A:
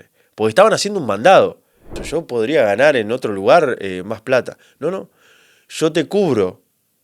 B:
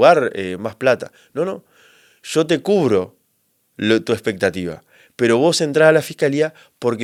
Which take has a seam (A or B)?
A